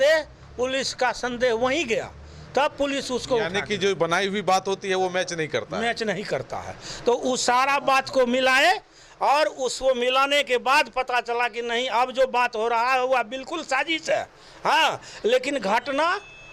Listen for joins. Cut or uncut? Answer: uncut